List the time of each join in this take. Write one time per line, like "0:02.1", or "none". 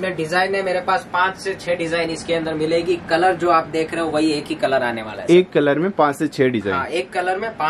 none